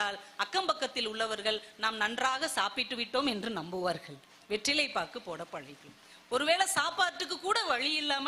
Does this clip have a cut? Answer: no; 0 cuts

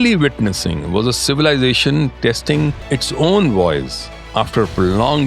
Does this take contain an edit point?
yes; 1 cut; at 2.8 s

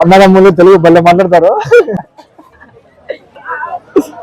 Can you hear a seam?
yes; 1 cut; at 2.0 s

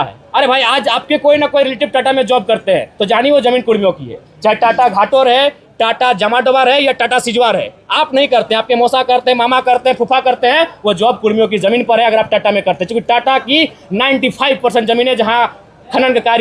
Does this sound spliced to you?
no; 0 cuts

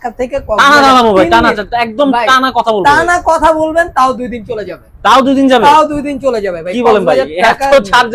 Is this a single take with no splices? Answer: yes; 0 cuts

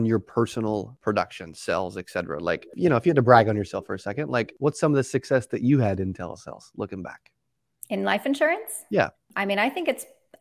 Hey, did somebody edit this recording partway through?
yes; 4 cuts; at 0.9 s, 2.7 s, 4.5 s, 9.2 s

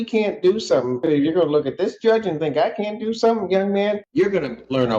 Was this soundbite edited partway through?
yes; 2 cuts; at 1.0 s, 4.0 s

